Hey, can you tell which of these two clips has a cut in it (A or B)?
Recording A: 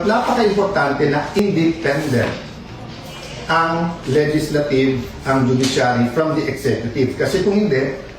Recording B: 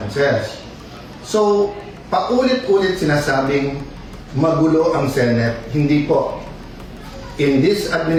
A